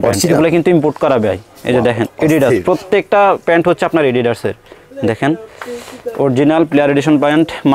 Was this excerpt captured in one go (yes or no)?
yes